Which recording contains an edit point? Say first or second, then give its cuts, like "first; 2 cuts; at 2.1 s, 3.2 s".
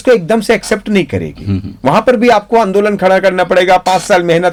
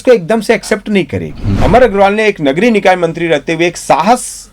second; 1 cut; at 1.5 s